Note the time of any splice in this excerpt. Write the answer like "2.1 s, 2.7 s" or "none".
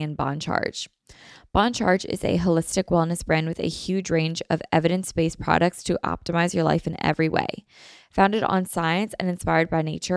none